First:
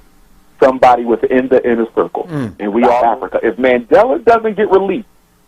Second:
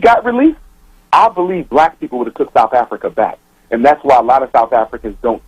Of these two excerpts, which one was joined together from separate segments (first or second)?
first